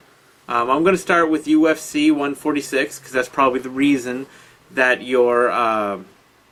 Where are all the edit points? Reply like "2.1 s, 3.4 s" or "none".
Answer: none